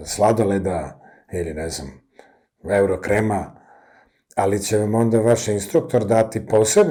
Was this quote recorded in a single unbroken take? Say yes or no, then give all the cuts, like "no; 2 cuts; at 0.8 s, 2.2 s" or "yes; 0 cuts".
yes; 0 cuts